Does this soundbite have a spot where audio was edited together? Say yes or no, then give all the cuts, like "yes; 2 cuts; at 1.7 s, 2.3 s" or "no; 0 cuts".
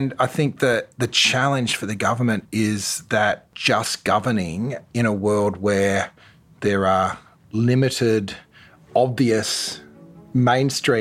yes; 1 cut; at 6.5 s